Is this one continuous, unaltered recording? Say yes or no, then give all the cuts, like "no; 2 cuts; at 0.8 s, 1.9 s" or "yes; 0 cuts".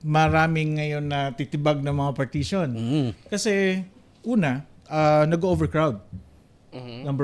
yes; 0 cuts